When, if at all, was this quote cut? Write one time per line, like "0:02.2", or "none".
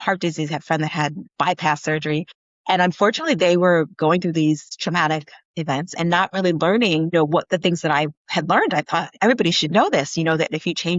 none